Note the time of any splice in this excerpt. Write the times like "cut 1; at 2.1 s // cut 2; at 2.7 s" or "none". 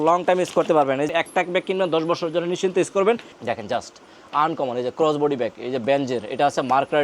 cut 1; at 1.1 s // cut 2; at 3.3 s